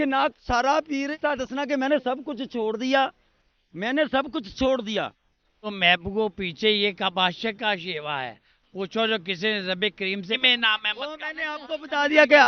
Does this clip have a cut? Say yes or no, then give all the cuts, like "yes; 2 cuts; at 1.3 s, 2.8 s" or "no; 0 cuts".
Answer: yes; 3 cuts; at 1.2 s, 5.7 s, 10.4 s